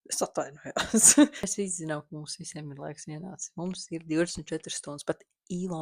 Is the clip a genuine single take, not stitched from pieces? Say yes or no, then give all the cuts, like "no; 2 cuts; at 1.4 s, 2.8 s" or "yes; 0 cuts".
no; 1 cut; at 1.5 s